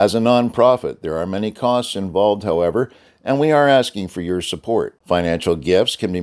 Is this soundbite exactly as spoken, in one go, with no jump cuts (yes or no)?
yes